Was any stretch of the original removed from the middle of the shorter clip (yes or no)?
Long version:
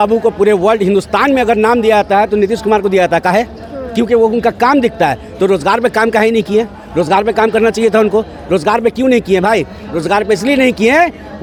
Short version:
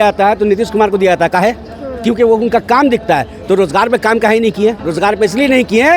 yes